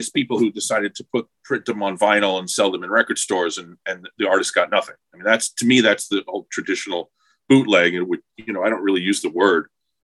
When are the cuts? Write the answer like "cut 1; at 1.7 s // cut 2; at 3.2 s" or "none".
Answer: none